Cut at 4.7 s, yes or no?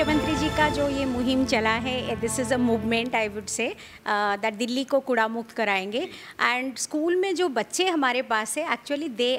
no